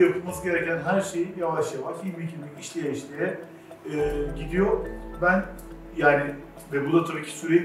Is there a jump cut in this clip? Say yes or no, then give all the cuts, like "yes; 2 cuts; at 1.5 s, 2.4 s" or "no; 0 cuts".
no; 0 cuts